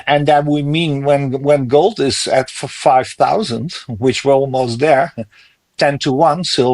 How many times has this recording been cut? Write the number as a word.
zero